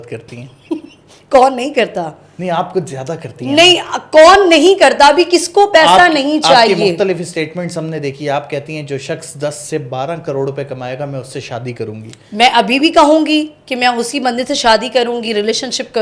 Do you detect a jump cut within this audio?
no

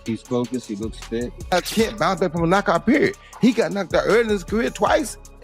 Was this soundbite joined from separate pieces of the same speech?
yes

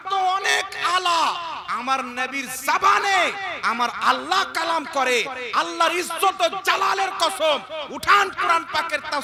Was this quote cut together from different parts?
no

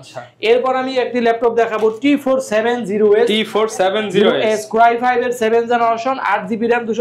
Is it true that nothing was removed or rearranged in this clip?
yes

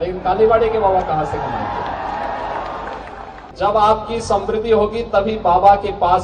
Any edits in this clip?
yes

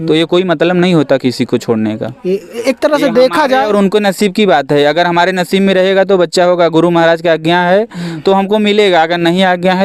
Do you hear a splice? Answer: no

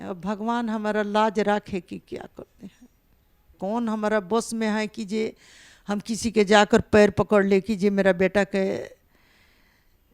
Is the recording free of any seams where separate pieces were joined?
no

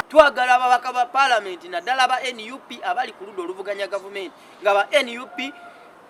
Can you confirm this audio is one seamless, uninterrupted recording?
yes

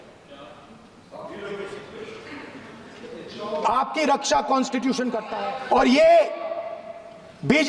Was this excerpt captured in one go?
no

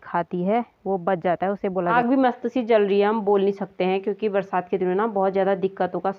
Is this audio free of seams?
no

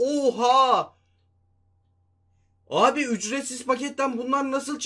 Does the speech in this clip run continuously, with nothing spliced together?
yes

